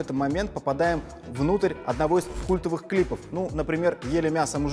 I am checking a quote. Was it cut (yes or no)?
no